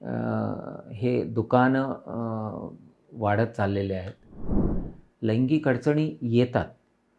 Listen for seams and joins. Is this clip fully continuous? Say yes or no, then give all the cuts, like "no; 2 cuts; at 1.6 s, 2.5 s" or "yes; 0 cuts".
no; 1 cut; at 4.6 s